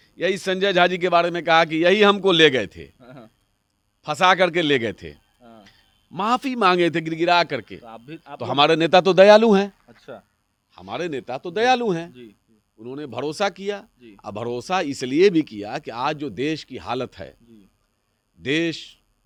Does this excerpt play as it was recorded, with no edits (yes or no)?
yes